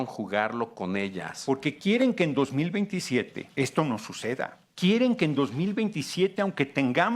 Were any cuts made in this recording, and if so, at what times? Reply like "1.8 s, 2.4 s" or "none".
1.3 s, 3.4 s, 4.6 s